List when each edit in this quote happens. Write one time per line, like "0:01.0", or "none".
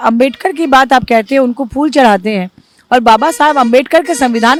none